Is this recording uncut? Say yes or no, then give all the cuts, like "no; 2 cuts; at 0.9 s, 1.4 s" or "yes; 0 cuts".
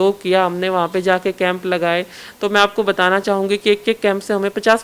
yes; 0 cuts